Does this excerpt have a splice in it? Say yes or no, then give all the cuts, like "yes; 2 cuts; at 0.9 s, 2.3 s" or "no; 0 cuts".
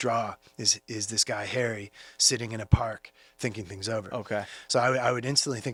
no; 0 cuts